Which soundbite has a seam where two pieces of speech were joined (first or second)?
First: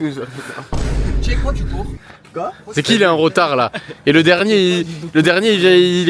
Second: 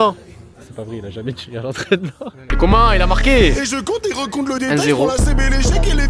second